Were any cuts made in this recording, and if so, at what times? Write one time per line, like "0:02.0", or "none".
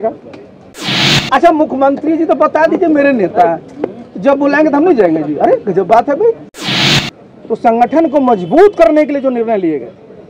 0:01.1
0:06.7